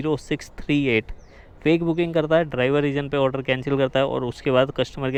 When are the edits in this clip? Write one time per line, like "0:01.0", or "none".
none